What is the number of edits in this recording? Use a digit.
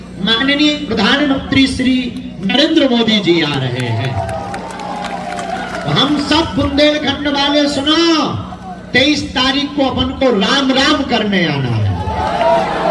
0